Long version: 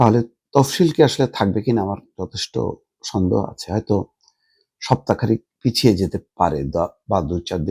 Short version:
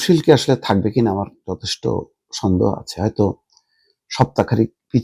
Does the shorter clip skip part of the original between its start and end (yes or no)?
no